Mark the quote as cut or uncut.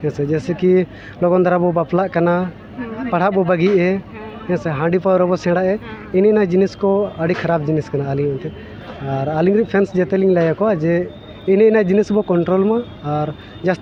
uncut